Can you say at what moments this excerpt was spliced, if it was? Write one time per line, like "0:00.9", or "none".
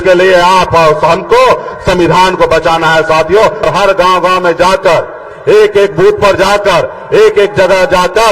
0:03.6

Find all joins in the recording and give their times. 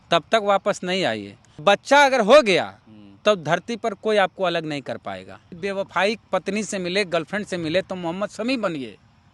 0:01.5
0:05.5

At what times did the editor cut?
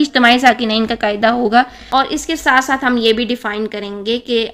0:01.8

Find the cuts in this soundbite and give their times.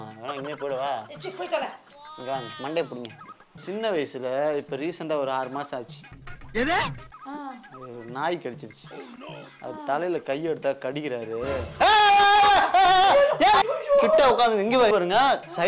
0:03.6
0:13.6

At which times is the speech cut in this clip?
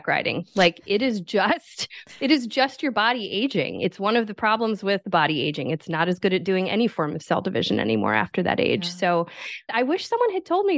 0:05.0
0:09.7

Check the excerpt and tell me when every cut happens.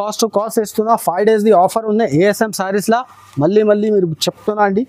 none

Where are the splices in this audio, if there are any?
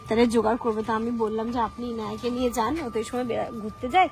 none

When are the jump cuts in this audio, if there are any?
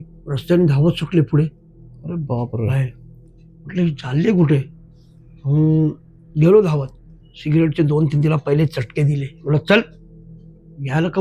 none

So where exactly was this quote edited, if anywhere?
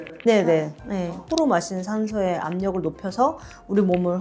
0:01.3

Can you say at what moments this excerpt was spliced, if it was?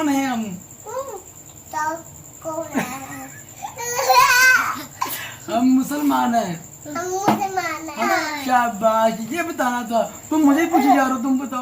0:08.0

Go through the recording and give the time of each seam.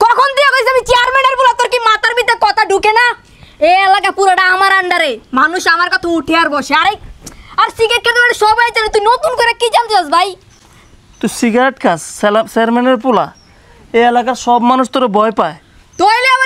none

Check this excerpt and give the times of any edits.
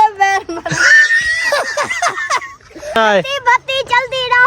0:03.0

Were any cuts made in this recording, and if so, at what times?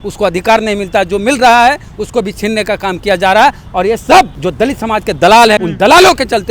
0:04.4
0:05.6

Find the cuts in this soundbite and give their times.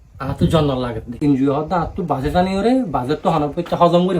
0:01.2

